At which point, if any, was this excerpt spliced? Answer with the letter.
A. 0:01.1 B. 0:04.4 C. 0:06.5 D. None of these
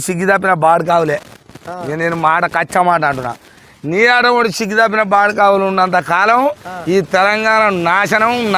D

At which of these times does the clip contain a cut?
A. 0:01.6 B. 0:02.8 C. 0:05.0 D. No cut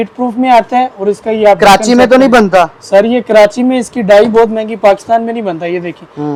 D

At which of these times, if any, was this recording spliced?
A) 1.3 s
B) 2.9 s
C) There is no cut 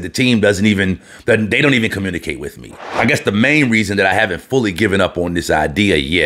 B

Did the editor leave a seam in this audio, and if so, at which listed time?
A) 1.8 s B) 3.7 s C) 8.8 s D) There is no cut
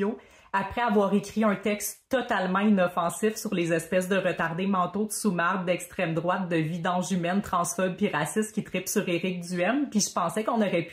D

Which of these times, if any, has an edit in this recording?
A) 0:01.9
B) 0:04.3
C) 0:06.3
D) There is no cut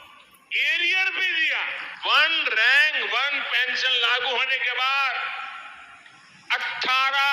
A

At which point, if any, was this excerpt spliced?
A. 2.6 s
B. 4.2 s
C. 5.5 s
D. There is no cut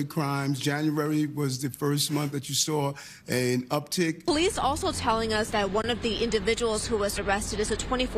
B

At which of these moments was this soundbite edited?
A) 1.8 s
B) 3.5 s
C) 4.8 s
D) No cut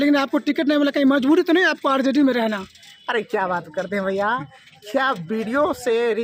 D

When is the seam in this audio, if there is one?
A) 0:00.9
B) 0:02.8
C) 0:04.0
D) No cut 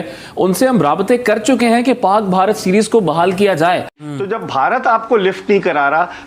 C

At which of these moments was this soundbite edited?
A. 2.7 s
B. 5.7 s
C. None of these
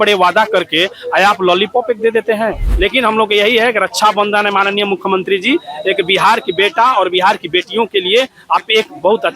A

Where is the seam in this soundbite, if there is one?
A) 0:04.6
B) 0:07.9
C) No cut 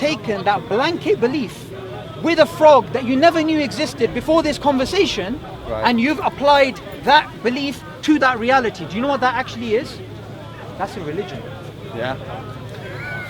C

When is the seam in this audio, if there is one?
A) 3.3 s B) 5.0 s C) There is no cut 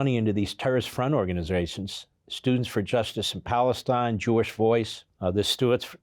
B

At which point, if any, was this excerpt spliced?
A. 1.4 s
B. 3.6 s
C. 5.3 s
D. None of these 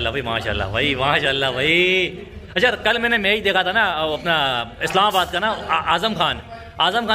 D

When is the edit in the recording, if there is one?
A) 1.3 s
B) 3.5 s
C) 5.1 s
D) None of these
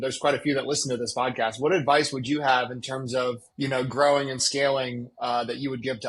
B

